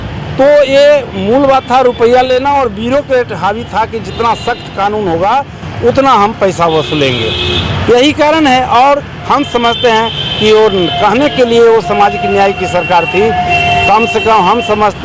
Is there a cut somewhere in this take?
no; 0 cuts

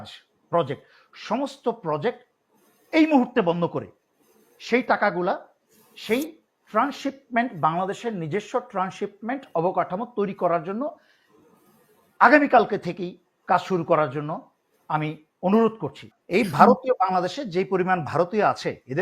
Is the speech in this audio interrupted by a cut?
yes; 1 cut; at 16.1 s

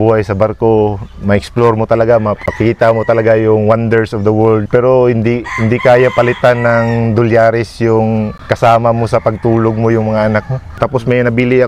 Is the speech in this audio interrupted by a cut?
yes; 4 cuts; at 2.5 s, 4.6 s, 8.4 s, 10.8 s

